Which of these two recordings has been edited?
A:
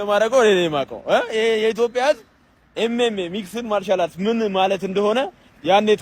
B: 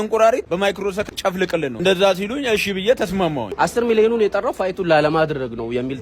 B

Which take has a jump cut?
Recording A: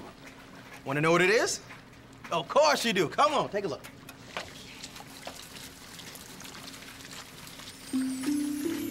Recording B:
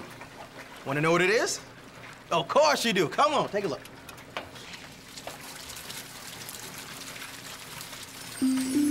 A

